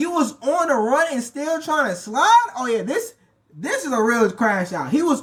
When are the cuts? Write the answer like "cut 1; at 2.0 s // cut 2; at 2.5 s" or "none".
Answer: none